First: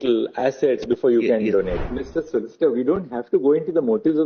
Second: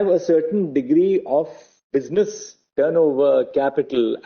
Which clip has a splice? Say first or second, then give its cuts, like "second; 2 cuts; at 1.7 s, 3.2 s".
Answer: first; 1 cut; at 1.7 s